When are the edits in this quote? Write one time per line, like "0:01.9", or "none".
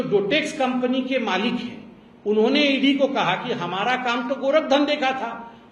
none

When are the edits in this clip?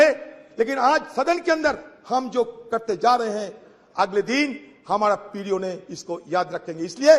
none

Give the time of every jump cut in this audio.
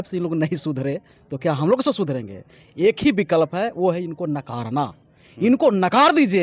none

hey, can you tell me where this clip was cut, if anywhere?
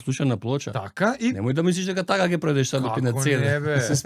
none

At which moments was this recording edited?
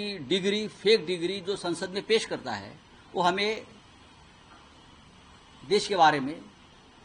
none

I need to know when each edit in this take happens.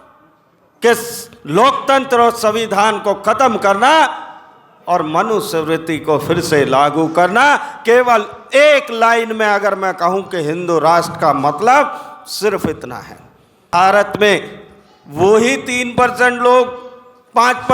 0:13.7

